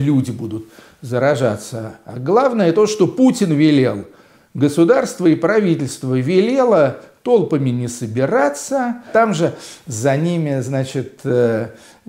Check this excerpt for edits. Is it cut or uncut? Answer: cut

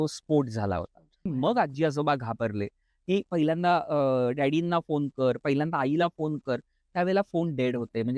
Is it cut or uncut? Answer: cut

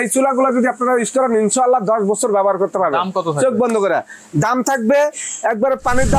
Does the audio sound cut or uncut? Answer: uncut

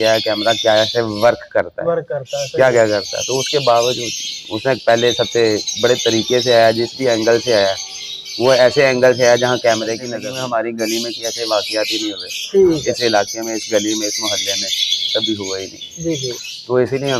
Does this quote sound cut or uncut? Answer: cut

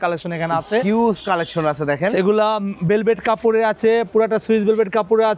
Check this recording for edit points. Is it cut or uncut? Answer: uncut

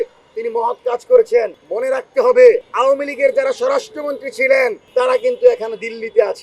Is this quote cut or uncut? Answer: cut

